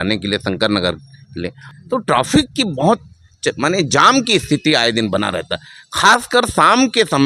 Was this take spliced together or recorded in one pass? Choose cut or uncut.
cut